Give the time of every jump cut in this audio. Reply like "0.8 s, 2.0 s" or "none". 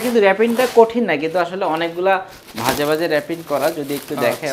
none